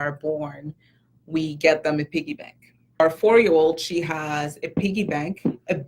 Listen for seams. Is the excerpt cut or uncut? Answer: cut